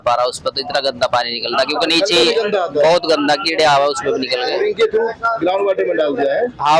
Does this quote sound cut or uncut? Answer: uncut